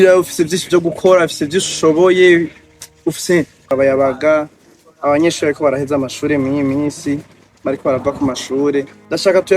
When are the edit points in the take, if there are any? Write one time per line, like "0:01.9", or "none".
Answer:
0:03.7

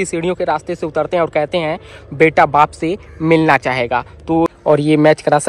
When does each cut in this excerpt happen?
0:04.5

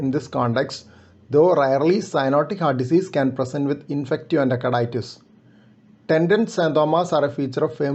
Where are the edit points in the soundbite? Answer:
none

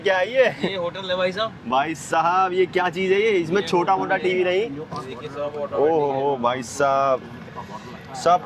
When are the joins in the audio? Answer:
none

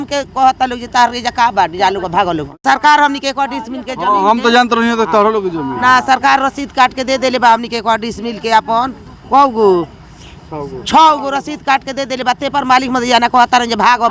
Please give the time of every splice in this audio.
0:02.6

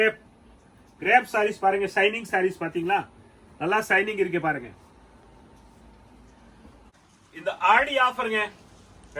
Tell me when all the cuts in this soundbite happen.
0:06.9

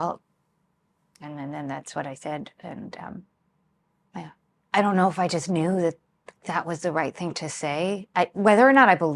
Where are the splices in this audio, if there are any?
0:04.5

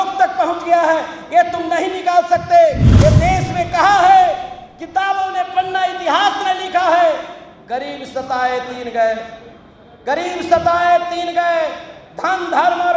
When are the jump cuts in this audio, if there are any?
0:02.9

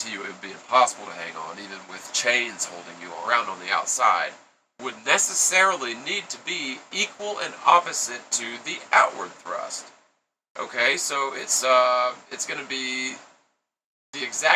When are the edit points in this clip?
none

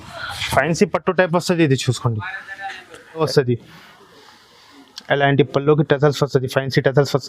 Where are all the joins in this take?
0:03.2

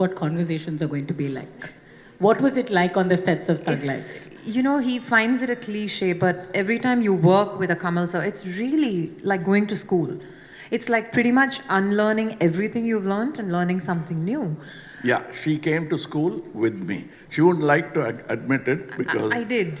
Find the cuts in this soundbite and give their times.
none

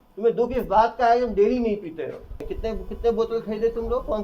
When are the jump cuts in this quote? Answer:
0:02.5

